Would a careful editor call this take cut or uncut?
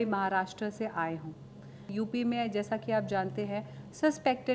cut